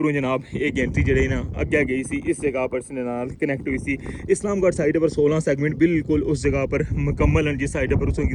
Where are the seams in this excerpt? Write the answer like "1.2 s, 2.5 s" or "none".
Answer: none